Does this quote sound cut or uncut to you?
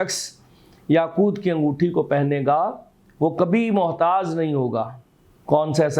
uncut